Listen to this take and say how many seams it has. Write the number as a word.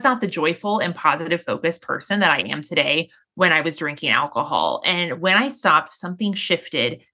zero